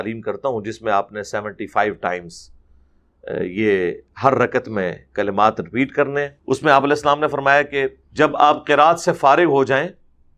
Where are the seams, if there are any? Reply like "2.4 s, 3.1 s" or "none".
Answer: 6.4 s, 8.0 s